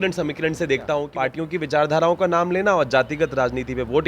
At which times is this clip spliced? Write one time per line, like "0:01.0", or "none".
0:01.1